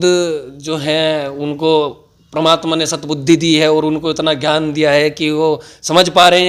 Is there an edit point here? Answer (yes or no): no